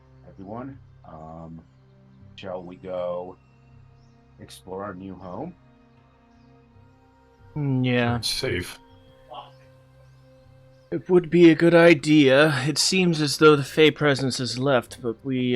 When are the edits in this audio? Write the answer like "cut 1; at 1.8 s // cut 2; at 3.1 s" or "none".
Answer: cut 1; at 7.1 s

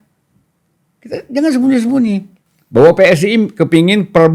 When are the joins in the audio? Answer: none

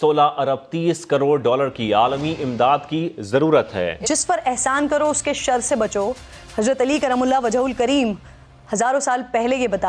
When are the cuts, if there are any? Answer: cut 1; at 4.0 s

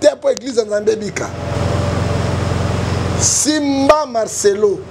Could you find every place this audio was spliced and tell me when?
cut 1; at 1.5 s

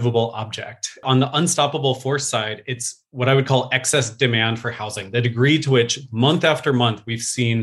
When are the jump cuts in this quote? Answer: cut 1; at 1.0 s

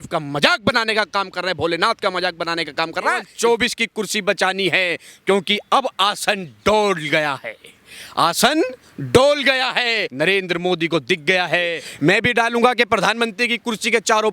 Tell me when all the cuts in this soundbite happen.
cut 1; at 3.3 s // cut 2; at 10.0 s // cut 3; at 11.8 s

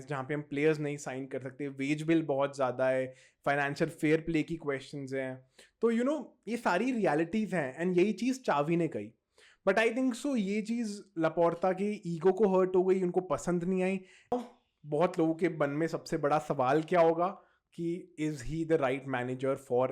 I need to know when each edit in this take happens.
cut 1; at 14.3 s

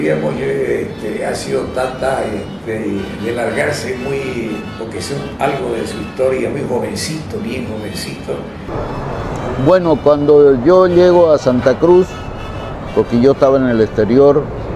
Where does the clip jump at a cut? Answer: cut 1; at 8.8 s

